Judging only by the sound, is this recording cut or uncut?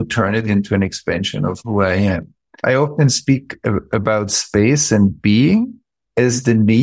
cut